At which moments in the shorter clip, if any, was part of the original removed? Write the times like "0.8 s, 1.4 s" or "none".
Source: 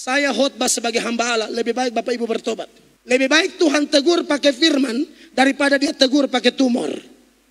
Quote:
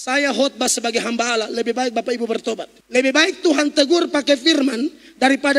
2.7 s